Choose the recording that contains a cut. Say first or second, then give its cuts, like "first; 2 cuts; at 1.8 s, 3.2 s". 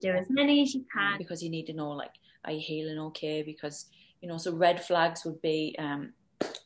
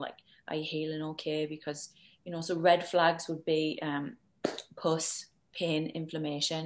first; 1 cut; at 1.1 s